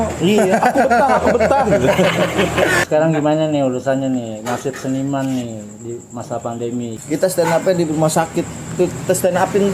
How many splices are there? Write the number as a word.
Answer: two